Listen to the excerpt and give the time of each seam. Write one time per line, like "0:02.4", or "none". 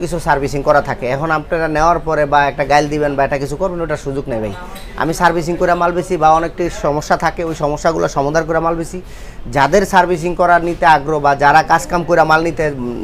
none